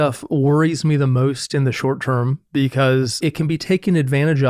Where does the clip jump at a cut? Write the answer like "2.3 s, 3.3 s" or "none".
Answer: 3.1 s